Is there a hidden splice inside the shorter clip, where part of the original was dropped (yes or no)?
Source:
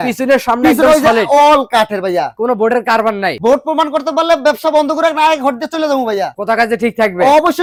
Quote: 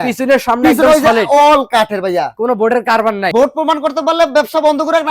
yes